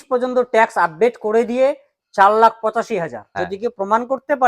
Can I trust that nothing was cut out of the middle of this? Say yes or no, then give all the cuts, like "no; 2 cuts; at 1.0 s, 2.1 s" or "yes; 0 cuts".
no; 1 cut; at 3.3 s